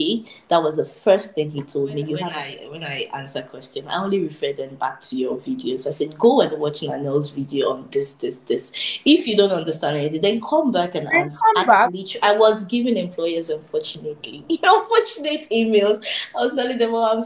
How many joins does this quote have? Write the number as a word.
two